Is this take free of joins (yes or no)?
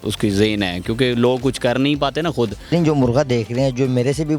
no